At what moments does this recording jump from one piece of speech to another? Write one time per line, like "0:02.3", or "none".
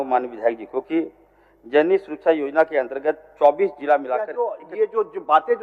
0:04.6